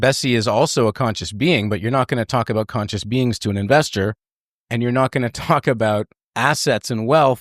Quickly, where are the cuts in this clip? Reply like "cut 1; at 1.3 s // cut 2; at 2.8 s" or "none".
cut 1; at 6.2 s